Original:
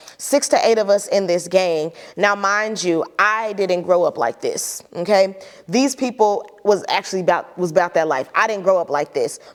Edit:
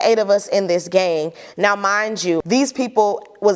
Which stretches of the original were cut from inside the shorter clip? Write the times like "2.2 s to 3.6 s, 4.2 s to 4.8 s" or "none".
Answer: 3.0 s to 5.7 s